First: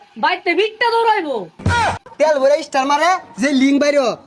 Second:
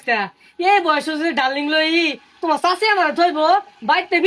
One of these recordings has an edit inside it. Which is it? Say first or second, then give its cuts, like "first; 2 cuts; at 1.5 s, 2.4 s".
first; 1 cut; at 1.8 s